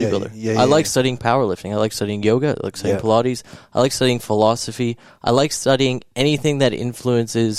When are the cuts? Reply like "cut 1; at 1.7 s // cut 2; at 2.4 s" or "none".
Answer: none